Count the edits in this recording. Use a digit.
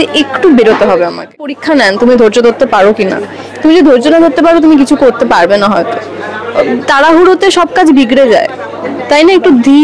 1